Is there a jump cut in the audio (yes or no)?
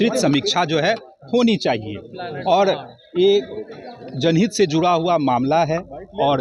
no